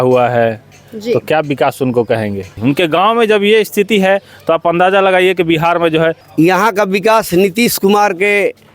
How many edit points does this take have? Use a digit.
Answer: 2